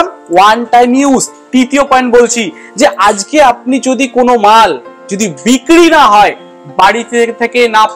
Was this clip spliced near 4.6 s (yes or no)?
no